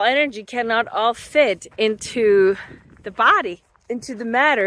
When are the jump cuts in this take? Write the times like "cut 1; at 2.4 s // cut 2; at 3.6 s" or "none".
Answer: cut 1; at 3.7 s